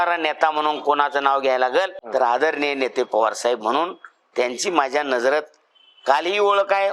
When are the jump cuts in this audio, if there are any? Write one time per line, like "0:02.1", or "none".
0:02.0

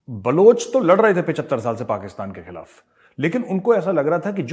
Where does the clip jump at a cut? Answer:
none

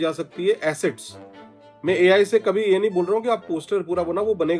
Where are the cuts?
none

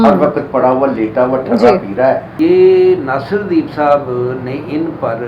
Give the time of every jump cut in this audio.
0:02.3

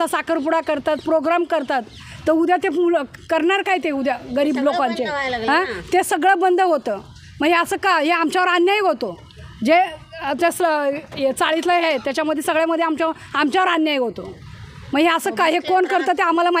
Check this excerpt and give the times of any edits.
none

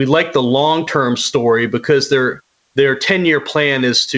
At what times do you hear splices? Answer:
none

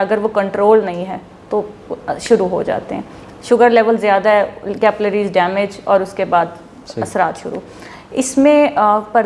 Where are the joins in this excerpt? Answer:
none

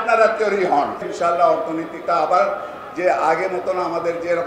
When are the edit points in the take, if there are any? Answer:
0:01.0

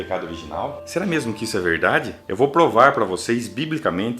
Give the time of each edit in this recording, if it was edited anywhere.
0:02.2

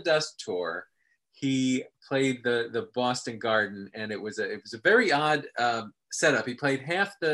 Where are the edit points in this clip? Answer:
0:01.9

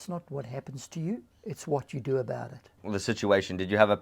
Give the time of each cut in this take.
0:01.3
0:02.7

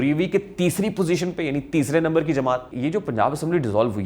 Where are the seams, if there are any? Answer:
0:02.7

